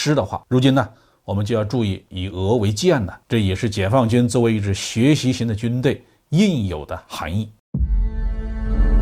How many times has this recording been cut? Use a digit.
1